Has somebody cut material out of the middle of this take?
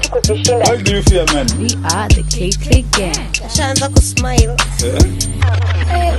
no; 0 cuts

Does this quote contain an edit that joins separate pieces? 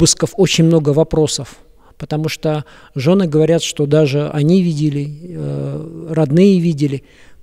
no; 0 cuts

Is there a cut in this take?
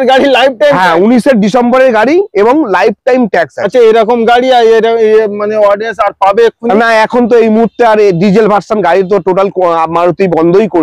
no; 0 cuts

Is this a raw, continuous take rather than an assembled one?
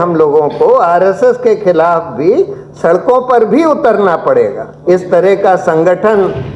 no; 1 cut; at 4.7 s

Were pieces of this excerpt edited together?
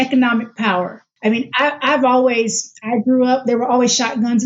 yes; 1 cut; at 1.0 s

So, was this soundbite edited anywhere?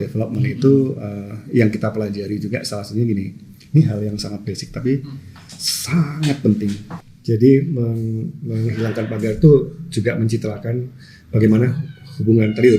yes; 1 cut; at 6.9 s

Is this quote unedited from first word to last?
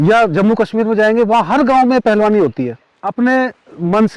no; 1 cut; at 3.1 s

